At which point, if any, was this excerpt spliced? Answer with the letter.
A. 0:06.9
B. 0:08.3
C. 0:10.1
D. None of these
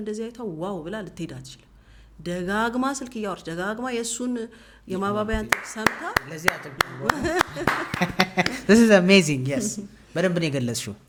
D